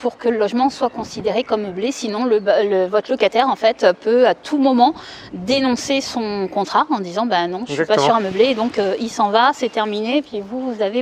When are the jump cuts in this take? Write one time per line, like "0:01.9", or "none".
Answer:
none